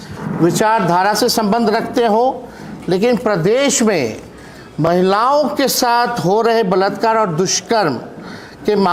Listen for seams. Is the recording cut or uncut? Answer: uncut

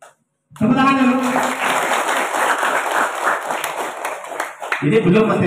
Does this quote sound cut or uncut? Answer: uncut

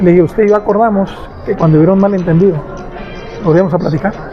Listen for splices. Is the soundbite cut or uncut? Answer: uncut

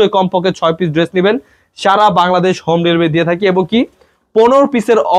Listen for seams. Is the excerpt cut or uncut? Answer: uncut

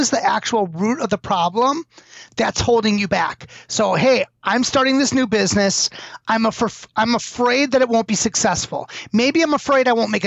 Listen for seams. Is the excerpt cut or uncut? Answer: uncut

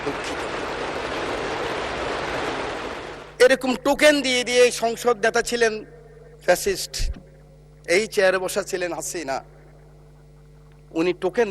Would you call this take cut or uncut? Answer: cut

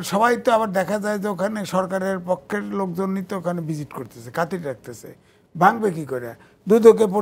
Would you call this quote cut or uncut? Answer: uncut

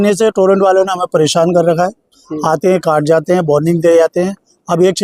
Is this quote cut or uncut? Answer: uncut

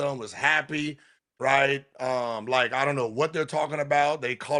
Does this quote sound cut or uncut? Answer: uncut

